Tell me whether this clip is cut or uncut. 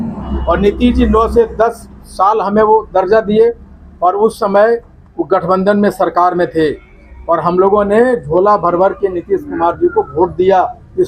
uncut